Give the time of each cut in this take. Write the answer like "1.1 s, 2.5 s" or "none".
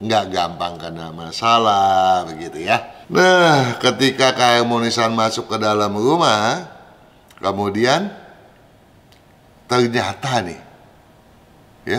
3.0 s